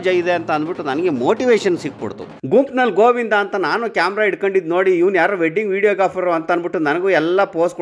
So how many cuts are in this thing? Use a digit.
1